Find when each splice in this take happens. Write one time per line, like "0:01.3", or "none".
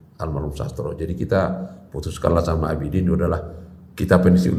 none